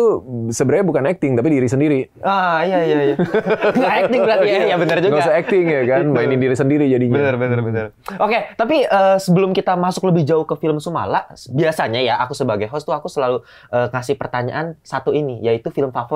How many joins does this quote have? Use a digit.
0